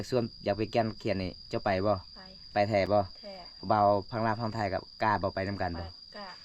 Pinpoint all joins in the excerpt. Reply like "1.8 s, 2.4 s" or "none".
none